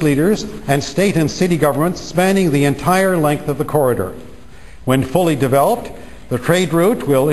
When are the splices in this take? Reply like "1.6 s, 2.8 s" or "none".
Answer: 4.5 s